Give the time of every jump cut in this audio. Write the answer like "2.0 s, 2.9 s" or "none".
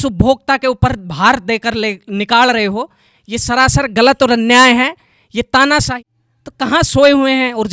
5.9 s